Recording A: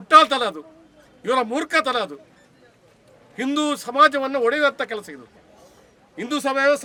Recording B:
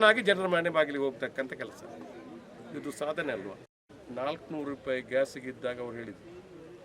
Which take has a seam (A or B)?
B